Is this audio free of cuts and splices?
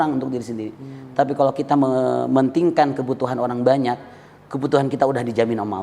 yes; 0 cuts

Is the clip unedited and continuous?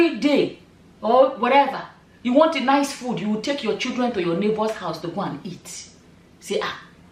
yes; 0 cuts

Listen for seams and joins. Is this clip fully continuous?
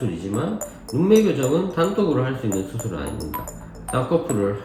yes; 0 cuts

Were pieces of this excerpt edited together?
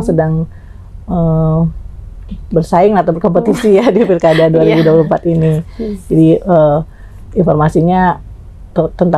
no; 0 cuts

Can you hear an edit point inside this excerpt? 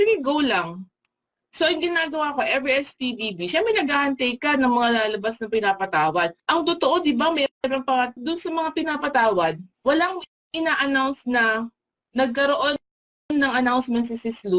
yes; 3 cuts; at 6.4 s, 8.2 s, 9.7 s

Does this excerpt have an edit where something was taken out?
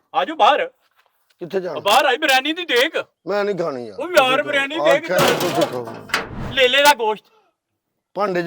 yes; 1 cut; at 6.4 s

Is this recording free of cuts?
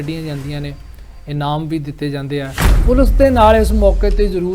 no; 1 cut; at 2.6 s

